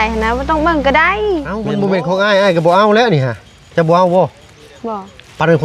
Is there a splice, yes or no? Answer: yes